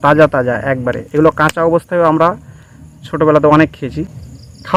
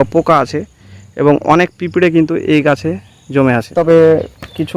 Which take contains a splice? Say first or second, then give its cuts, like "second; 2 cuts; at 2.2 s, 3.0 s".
second; 1 cut; at 3.7 s